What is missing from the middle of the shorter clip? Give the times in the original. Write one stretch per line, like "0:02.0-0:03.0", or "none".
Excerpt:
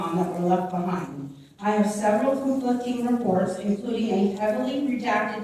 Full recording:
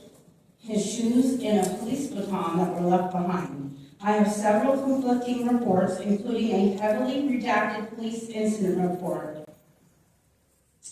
none